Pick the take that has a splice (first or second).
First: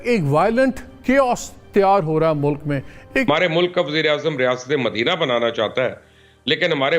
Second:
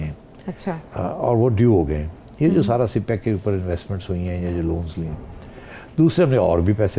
first